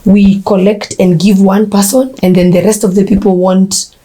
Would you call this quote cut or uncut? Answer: uncut